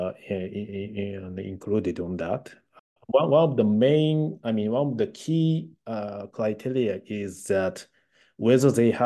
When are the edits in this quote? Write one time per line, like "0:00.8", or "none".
0:02.8